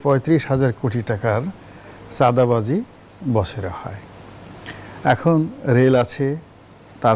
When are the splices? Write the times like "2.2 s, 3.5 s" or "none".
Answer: none

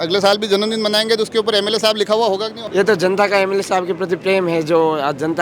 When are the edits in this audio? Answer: 2.6 s

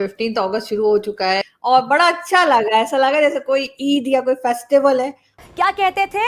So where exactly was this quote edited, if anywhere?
1.4 s, 5.4 s

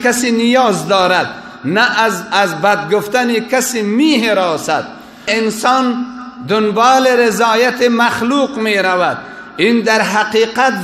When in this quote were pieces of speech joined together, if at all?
5.3 s

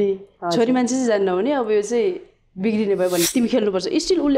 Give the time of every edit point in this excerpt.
3.3 s

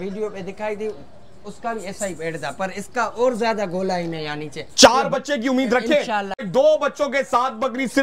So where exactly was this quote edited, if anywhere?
6.4 s

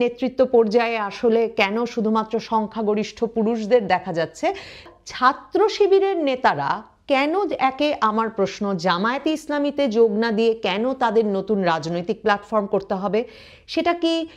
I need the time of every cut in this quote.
4.7 s

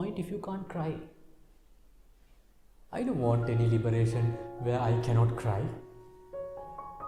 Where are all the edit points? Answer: none

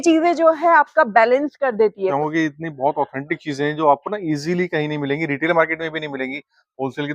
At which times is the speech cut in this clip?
2.1 s

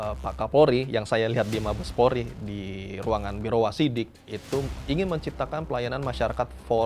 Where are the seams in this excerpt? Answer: none

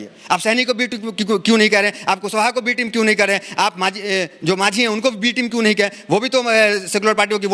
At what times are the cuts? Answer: none

